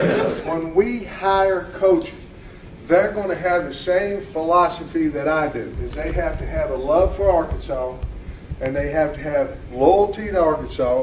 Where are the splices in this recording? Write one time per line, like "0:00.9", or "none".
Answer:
0:01.4